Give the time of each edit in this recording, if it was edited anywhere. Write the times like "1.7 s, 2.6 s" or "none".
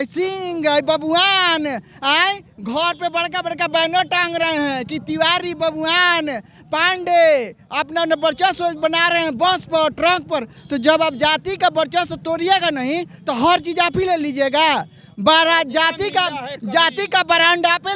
none